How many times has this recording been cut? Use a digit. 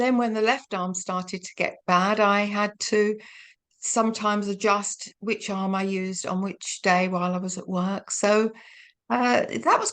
0